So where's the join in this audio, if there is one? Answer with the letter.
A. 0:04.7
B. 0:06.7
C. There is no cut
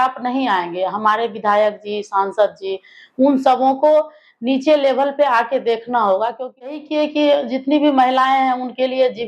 B